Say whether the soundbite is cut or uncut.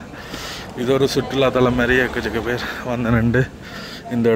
uncut